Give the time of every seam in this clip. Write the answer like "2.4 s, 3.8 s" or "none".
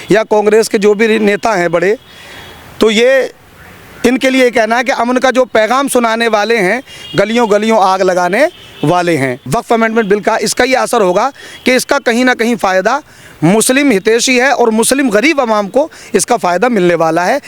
9.4 s